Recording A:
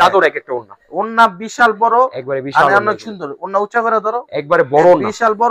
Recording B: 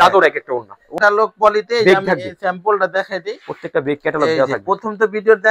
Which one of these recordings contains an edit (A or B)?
B